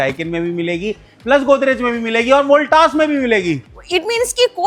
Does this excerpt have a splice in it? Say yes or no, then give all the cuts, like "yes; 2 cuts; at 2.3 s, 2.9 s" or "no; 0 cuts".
no; 0 cuts